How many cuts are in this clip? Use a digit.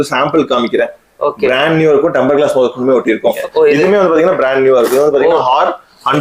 1